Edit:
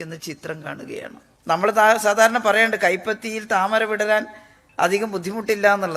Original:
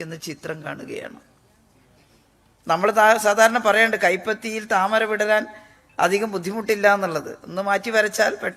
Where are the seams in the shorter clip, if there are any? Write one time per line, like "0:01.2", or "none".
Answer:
0:01.3